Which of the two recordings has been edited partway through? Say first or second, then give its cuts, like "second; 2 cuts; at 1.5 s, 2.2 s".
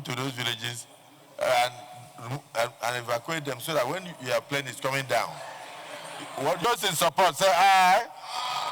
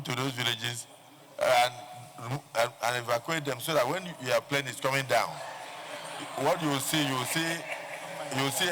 first; 1 cut; at 6.6 s